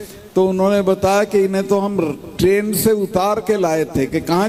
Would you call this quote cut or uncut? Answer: uncut